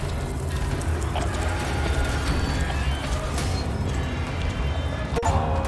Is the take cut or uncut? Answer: uncut